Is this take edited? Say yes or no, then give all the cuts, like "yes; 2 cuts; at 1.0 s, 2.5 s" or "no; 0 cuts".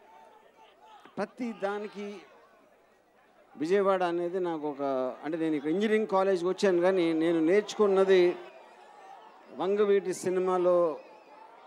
no; 0 cuts